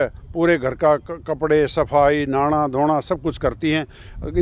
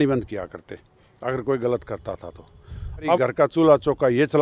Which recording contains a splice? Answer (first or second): second